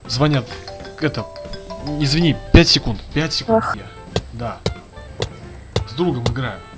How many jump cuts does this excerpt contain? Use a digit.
1